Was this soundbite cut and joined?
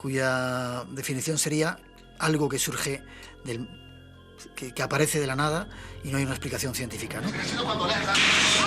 yes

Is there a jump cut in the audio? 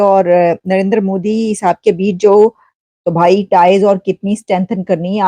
yes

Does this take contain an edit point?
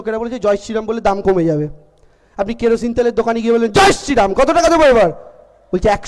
no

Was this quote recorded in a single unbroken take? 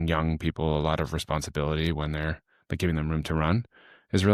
yes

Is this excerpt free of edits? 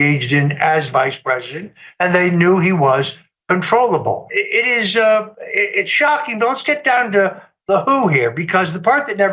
no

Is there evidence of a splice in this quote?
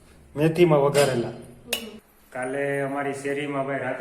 yes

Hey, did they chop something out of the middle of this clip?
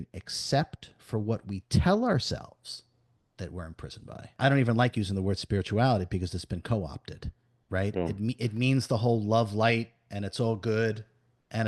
yes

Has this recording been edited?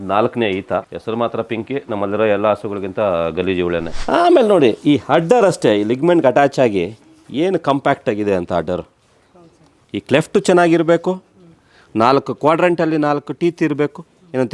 yes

